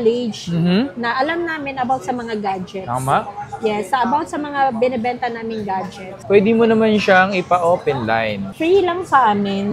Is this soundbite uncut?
no; 1 cut; at 6.2 s

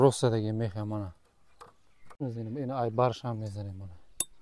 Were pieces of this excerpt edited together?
yes; 1 cut; at 2.2 s

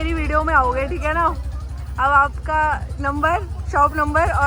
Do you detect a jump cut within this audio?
no; 0 cuts

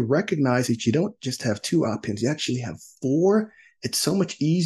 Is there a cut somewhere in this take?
no; 0 cuts

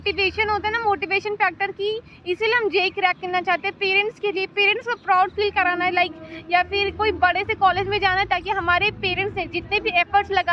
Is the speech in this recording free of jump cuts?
yes; 0 cuts

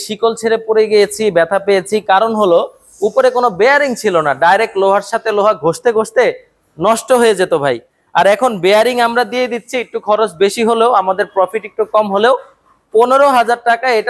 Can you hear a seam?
no; 0 cuts

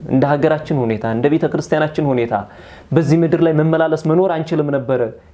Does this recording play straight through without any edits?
yes; 0 cuts

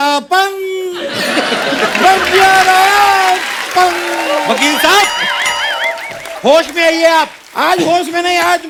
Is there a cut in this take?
no; 0 cuts

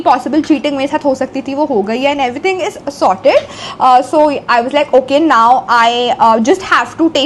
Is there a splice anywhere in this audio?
no; 0 cuts

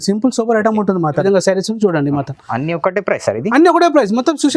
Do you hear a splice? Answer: yes; 1 cut; at 1.2 s

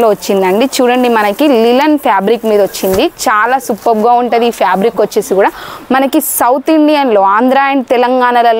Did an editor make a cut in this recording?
no; 0 cuts

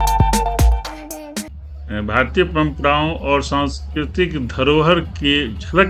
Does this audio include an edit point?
yes; 1 cut; at 1.4 s

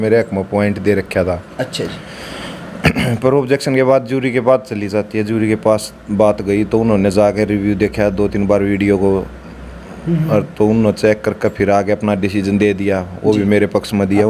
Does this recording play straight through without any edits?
yes; 0 cuts

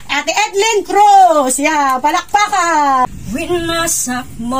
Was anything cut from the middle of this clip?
yes; 1 cut; at 3.1 s

